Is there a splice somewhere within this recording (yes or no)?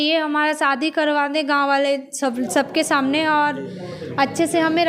no